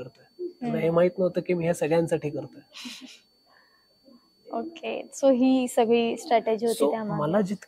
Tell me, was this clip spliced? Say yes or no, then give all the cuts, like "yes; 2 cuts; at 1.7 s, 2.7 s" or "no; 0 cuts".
no; 0 cuts